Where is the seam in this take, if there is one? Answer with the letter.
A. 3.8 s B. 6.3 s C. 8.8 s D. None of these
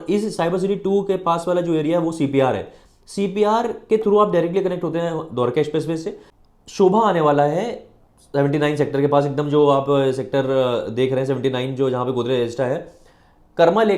B